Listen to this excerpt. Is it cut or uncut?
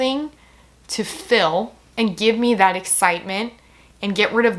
uncut